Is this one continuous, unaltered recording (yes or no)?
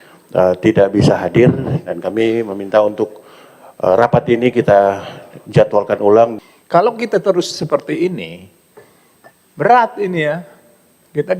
no